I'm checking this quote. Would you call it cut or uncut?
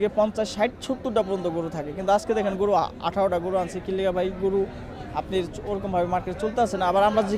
uncut